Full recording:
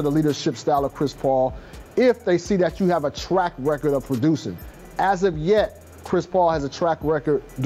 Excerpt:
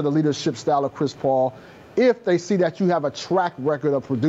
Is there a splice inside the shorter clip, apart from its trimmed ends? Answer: no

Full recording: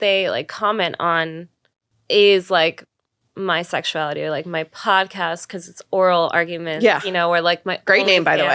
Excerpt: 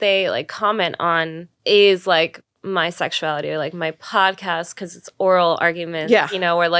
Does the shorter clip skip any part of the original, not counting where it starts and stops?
yes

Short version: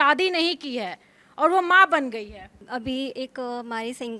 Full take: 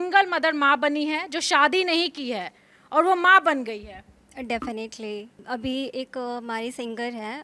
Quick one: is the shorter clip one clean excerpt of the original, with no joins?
no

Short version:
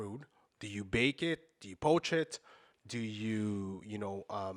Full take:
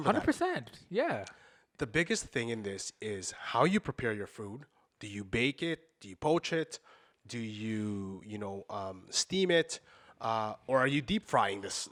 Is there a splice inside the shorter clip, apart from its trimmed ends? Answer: no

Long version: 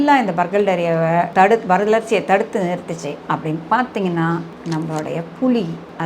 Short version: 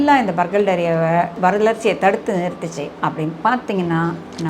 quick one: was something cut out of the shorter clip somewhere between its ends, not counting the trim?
yes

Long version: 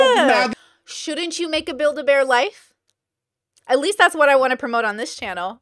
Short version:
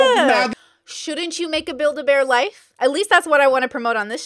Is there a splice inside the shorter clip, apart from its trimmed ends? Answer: yes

